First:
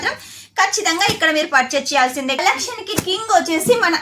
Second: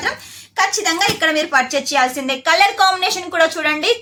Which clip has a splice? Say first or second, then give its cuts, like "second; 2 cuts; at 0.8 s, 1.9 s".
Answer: first; 1 cut; at 2.4 s